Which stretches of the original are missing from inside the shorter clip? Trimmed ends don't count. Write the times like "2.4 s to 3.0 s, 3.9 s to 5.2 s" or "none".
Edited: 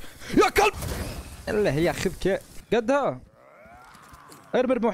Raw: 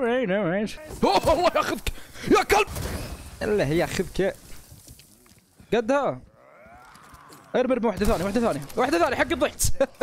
4.5 s to 5.5 s